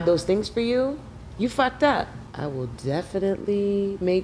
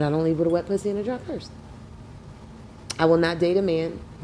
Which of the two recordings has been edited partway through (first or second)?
first